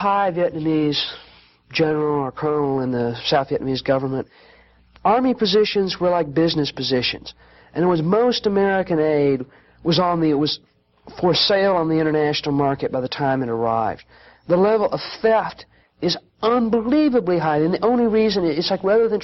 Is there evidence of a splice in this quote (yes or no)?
no